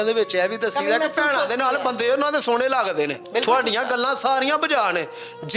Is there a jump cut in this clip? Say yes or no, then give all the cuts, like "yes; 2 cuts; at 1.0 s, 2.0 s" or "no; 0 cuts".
yes; 1 cut; at 3.2 s